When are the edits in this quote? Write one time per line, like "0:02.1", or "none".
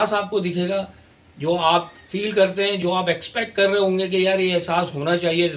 0:02.8